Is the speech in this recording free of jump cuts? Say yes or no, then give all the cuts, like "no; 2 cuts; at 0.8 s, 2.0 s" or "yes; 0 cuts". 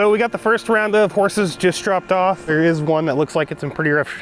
no; 1 cut; at 2.5 s